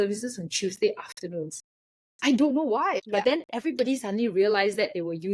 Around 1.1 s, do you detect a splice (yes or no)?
no